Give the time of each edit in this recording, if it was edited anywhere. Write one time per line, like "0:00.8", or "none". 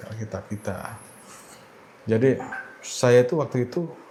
none